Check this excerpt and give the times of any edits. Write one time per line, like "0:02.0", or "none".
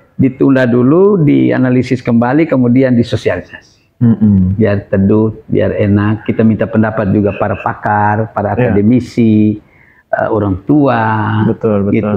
none